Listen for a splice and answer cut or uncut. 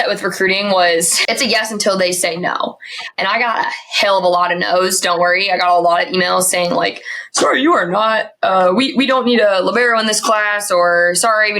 cut